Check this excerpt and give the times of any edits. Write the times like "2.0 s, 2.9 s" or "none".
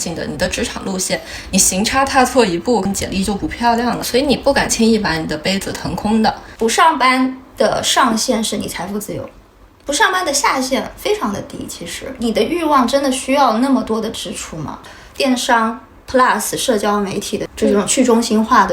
4.0 s, 6.5 s, 14.8 s, 17.5 s